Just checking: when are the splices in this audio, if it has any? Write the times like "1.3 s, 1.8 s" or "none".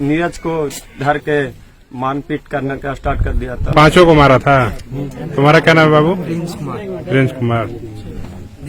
3.6 s